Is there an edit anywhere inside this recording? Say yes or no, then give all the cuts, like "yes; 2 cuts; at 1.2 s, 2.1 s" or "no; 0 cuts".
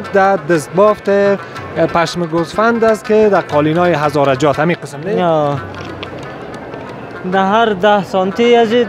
no; 0 cuts